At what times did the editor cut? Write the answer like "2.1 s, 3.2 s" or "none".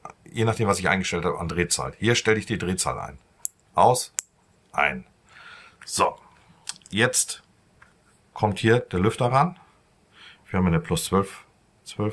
none